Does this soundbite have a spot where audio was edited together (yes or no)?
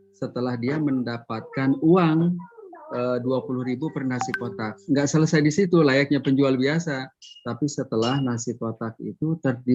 no